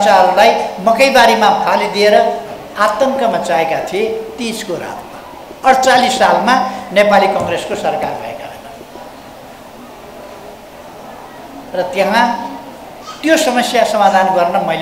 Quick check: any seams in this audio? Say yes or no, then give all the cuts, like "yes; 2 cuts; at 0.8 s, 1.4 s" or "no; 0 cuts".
no; 0 cuts